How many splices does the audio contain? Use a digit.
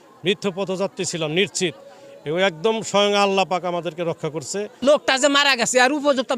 1